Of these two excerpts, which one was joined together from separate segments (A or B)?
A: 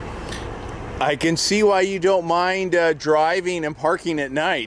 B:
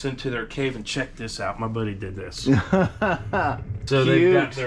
B